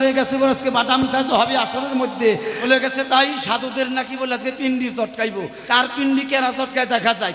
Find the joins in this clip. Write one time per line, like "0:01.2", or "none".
0:02.6
0:05.6